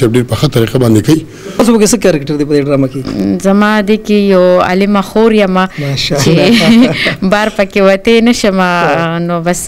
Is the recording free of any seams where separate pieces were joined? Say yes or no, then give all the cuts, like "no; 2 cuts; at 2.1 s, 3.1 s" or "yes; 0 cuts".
no; 1 cut; at 1.6 s